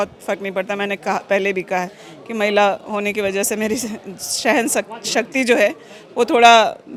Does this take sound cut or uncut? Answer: uncut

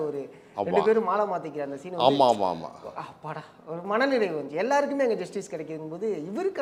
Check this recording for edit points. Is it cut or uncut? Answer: uncut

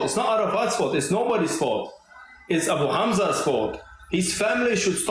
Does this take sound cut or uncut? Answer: uncut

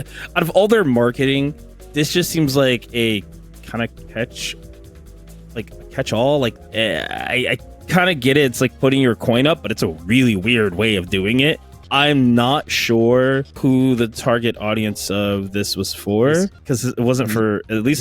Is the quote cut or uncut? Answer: cut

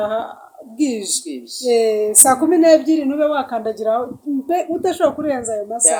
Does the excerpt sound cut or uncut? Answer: uncut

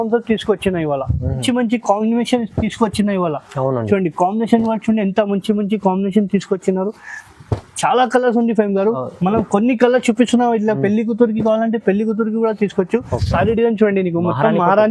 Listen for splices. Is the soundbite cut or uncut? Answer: cut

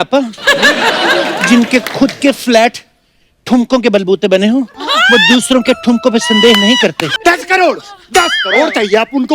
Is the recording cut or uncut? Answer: cut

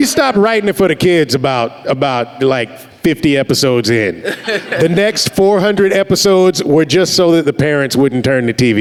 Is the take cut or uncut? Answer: uncut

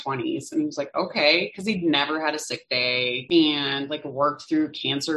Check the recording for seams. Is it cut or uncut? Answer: cut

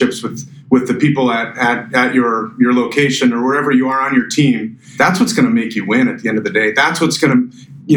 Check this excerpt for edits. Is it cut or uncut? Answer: uncut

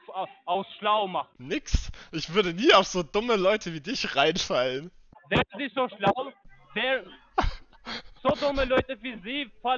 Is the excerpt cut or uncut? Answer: uncut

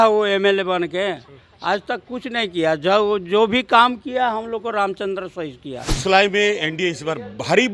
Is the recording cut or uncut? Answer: cut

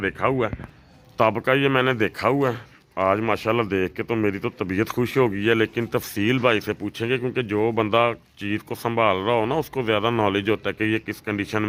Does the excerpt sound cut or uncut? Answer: uncut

